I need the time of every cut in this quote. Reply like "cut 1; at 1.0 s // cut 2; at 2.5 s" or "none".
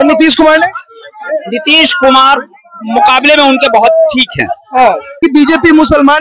cut 1; at 5.1 s